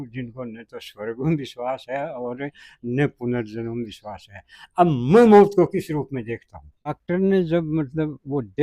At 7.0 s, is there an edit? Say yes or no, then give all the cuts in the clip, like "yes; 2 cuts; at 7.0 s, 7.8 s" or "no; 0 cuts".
yes; 1 cut; at 7.0 s